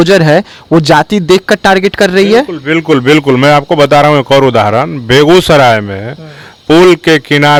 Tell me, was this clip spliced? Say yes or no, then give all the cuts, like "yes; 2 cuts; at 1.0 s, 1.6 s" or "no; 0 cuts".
no; 0 cuts